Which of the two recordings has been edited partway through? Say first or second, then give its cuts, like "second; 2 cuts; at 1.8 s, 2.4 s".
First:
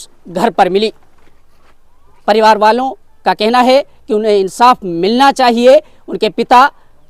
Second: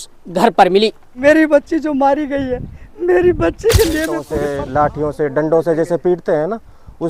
second; 2 cuts; at 1.1 s, 4.3 s